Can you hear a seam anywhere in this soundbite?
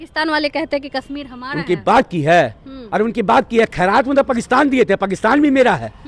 no; 0 cuts

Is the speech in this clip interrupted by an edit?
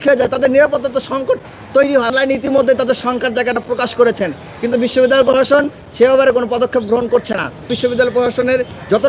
yes; 2 cuts; at 2.1 s, 7.7 s

